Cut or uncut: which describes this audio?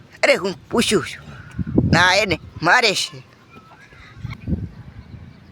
cut